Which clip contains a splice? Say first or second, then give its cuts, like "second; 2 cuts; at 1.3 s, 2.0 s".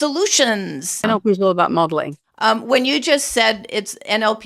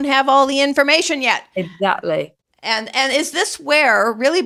first; 2 cuts; at 1.0 s, 2.2 s